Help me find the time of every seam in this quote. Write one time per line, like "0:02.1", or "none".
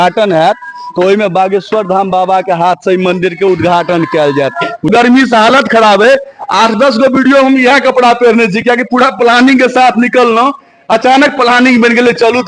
0:04.9